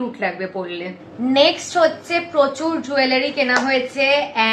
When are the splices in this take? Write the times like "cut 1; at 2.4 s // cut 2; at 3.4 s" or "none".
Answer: none